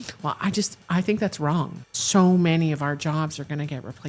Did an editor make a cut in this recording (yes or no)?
yes